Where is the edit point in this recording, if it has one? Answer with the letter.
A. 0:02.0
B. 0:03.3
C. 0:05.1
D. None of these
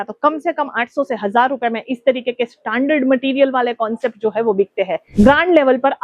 C